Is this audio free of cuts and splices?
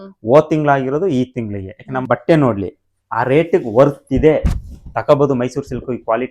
no; 1 cut; at 2.0 s

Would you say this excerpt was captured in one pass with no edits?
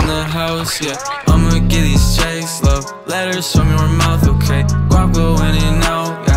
yes; 0 cuts

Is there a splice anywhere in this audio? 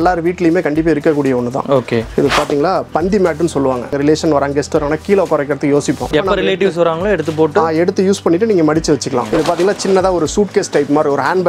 yes; 3 cuts; at 3.9 s, 6.1 s, 9.3 s

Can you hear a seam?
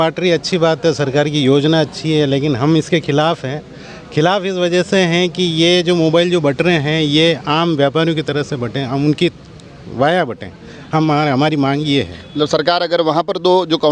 no; 0 cuts

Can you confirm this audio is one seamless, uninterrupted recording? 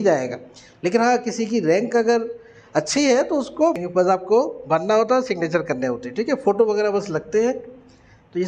no; 1 cut; at 3.8 s

